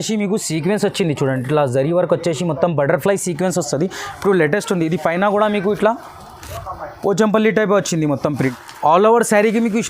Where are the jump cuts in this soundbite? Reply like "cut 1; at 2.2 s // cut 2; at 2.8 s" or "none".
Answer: cut 1; at 8.6 s